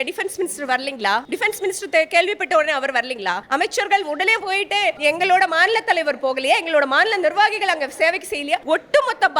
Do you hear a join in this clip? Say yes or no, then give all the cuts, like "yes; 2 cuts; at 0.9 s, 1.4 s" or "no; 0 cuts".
yes; 4 cuts; at 1.3 s, 3.4 s, 5.0 s, 8.6 s